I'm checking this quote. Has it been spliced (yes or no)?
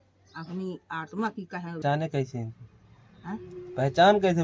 yes